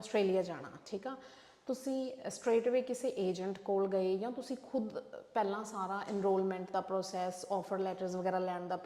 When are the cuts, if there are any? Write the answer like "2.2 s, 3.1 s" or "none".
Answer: none